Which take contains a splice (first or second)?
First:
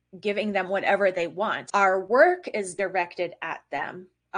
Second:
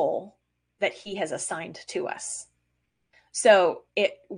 first